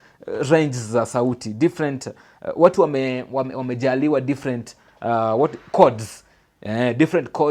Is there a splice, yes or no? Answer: no